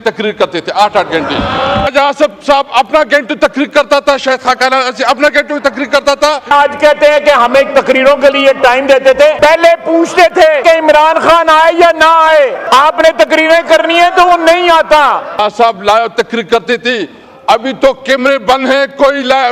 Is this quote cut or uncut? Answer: cut